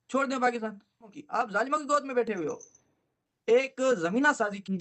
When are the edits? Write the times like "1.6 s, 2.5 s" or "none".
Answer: 1.2 s, 3.3 s